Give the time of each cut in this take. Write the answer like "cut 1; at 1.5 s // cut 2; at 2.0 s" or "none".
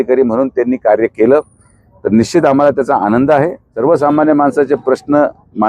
cut 1; at 3.6 s

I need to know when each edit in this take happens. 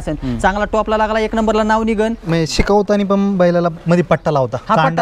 cut 1; at 2.2 s

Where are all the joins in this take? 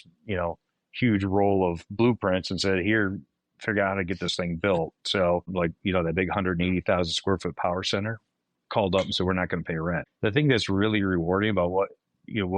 cut 1; at 5.5 s // cut 2; at 10.1 s

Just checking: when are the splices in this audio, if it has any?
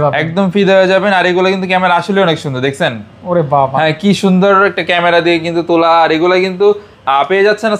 none

